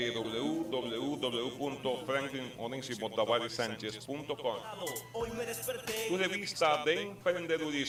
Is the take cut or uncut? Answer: uncut